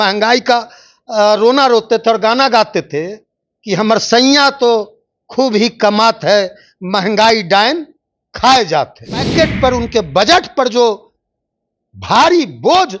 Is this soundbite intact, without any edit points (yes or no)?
no